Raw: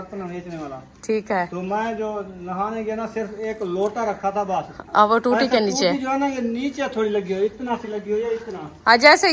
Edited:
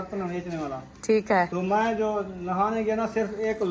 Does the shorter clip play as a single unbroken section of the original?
yes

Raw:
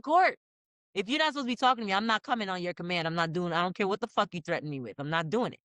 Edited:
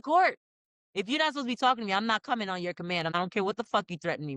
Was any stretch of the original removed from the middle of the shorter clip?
yes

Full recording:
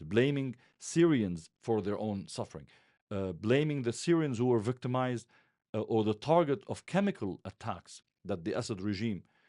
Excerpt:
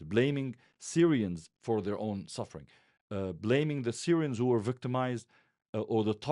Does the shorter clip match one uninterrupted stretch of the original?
yes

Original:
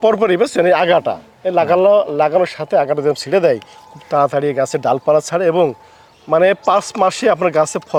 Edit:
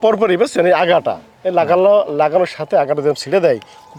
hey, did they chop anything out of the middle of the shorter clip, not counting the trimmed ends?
no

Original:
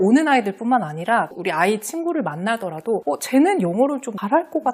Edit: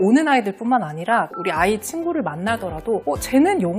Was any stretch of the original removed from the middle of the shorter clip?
no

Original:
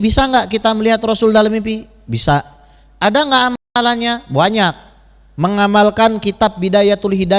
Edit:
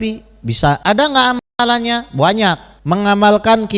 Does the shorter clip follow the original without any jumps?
no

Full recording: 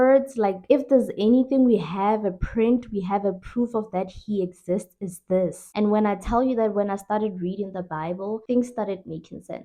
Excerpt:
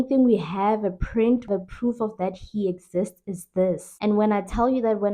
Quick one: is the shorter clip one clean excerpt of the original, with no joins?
no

